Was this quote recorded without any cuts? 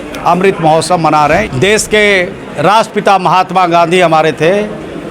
no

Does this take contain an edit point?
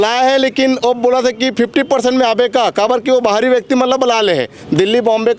no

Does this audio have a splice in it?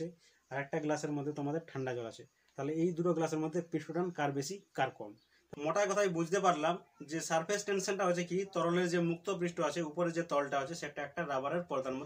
yes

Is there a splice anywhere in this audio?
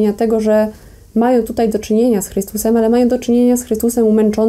no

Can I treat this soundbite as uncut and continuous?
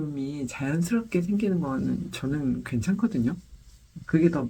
yes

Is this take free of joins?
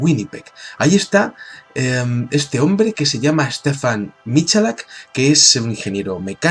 no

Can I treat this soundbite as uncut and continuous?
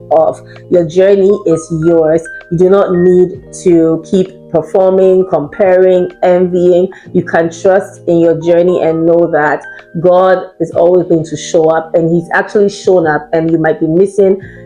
yes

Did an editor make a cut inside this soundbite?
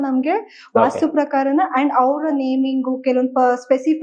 no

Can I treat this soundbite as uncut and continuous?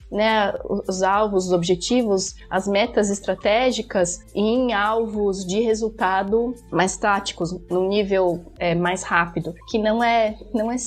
yes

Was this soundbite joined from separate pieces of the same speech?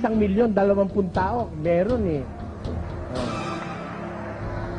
no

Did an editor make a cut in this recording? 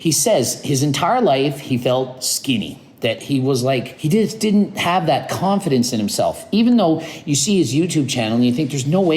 yes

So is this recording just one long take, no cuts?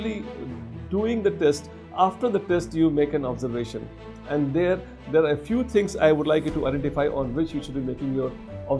yes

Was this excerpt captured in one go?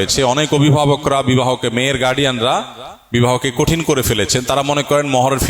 yes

